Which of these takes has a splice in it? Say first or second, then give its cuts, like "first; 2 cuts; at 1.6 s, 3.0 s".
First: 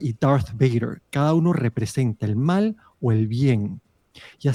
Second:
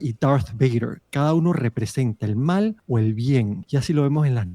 second; 2 cuts; at 2.8 s, 3.6 s